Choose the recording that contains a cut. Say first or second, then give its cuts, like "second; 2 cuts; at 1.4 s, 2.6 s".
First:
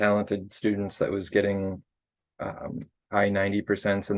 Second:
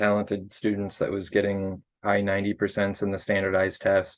second; 1 cut; at 1.9 s